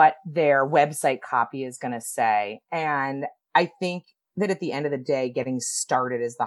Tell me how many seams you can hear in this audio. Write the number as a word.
zero